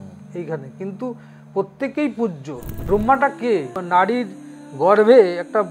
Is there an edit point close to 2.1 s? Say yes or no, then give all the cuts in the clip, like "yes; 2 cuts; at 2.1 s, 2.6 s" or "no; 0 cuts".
no; 1 cut; at 3.8 s